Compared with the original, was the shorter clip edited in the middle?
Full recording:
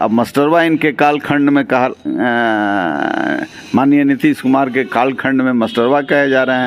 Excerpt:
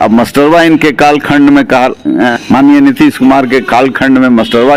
yes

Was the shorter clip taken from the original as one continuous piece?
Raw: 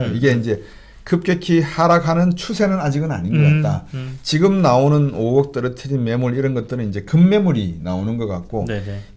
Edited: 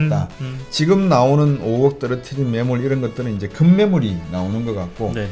yes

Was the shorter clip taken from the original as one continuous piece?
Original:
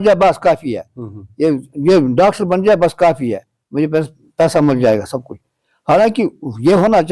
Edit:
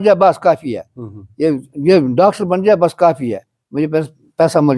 yes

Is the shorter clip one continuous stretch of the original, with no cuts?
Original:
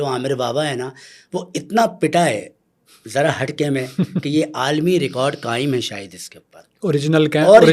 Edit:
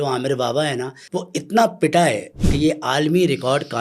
no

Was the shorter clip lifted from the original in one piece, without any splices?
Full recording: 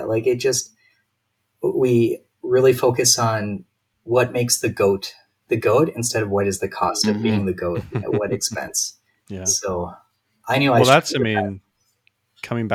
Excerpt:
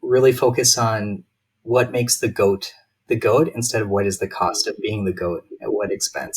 yes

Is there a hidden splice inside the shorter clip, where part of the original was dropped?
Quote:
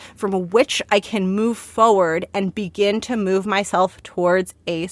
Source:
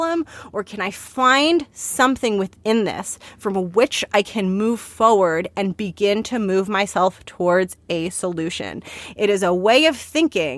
no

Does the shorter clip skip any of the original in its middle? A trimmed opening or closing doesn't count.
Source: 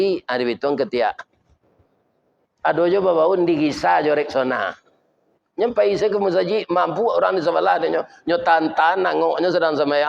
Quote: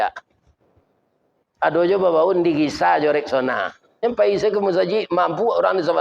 yes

